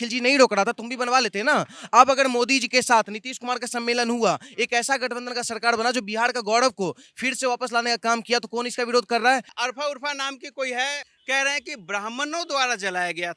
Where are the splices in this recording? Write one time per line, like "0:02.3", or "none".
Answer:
0:09.5
0:11.1